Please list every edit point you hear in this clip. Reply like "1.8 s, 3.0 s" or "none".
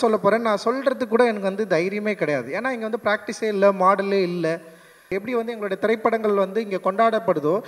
5.1 s